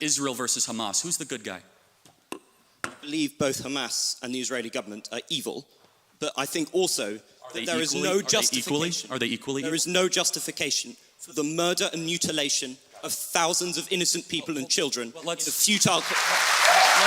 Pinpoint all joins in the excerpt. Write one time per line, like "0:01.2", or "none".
0:14.1